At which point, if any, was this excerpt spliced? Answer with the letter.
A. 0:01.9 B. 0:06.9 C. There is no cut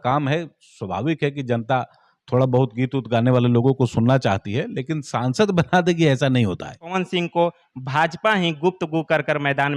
B